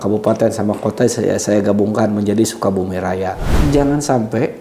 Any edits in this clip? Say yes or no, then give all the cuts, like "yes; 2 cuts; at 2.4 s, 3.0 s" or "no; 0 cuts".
yes; 1 cut; at 3.5 s